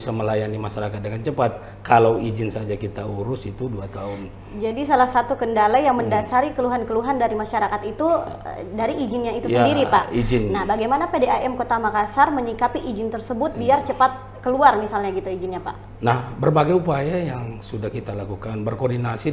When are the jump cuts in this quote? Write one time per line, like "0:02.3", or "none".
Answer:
none